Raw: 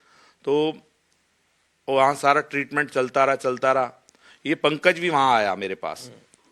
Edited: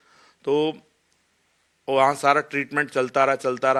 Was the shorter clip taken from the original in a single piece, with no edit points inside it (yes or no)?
yes